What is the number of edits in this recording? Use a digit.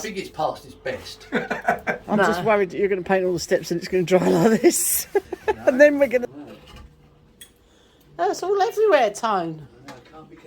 2